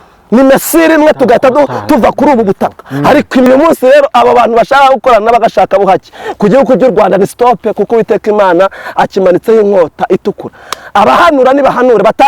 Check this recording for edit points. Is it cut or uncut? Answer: cut